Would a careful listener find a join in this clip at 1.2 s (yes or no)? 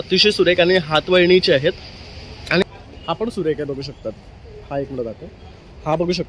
no